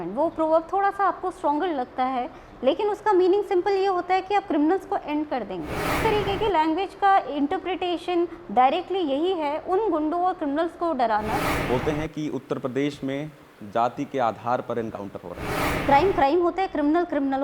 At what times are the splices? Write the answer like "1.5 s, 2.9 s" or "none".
6.0 s, 11.5 s, 15.7 s